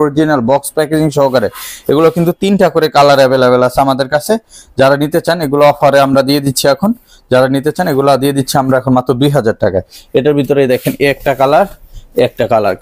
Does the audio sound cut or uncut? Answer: uncut